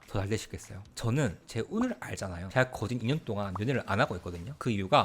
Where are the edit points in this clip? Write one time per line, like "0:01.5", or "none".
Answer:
0:00.9